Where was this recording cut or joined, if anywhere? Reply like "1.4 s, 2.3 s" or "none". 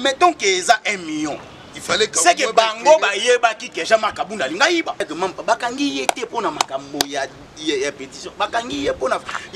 5.1 s

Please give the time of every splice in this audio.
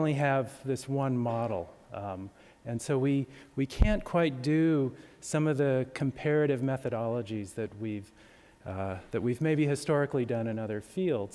7.2 s

